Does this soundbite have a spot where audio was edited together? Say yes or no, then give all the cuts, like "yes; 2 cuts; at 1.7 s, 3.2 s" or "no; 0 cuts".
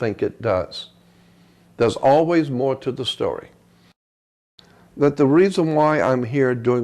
yes; 1 cut; at 4.3 s